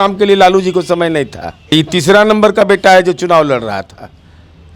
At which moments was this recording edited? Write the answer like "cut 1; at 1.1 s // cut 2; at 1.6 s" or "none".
cut 1; at 1.7 s